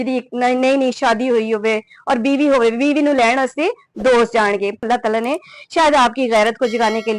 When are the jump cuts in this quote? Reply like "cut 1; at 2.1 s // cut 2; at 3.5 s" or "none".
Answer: cut 1; at 4.8 s

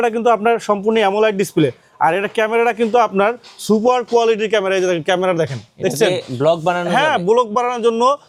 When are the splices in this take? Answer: none

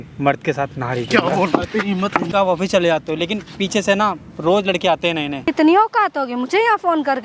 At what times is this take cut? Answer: cut 1; at 2.3 s // cut 2; at 5.3 s

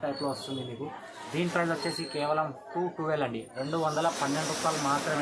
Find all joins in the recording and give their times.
none

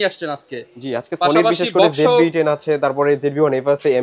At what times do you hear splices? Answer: none

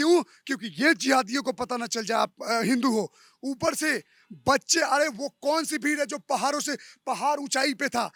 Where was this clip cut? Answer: none

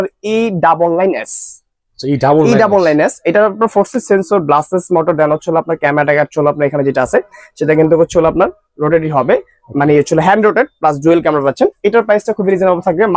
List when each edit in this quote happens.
none

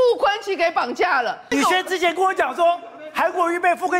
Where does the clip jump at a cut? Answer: cut 1; at 1.5 s

